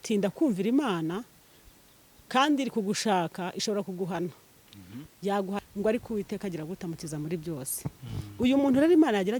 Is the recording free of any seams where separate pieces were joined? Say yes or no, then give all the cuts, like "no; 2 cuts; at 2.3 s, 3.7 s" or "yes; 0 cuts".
no; 1 cut; at 5.6 s